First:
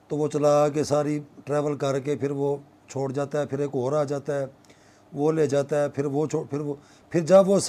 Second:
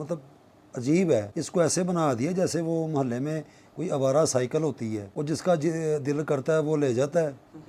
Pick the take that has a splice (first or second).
second